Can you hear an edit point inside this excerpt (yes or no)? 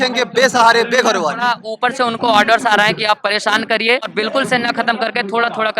yes